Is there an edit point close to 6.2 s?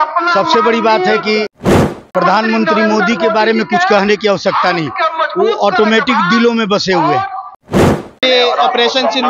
no; 1 cut; at 7.9 s

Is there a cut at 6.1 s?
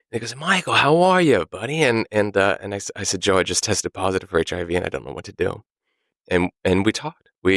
yes; 1 cut; at 6.1 s

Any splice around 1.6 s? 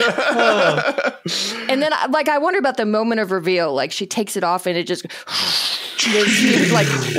yes; 1 cut; at 1.6 s

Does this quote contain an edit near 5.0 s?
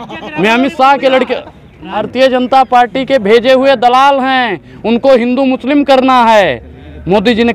no; 1 cut; at 2.0 s

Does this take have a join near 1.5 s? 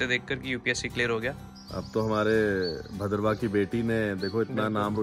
yes; 1 cut; at 1.5 s

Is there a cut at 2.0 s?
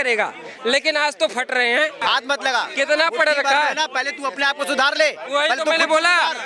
yes; 1 cut; at 2.0 s

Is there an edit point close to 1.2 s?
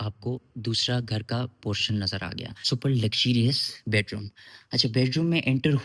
no; 1 cut; at 2.6 s

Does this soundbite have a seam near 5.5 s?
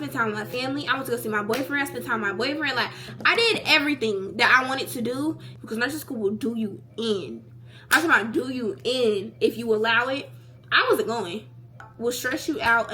yes; 2 cuts; at 5.5 s, 11.8 s

